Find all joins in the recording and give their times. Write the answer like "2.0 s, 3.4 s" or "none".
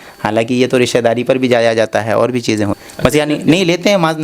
2.7 s